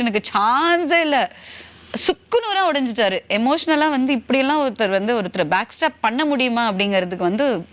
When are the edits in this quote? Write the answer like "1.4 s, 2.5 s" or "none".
none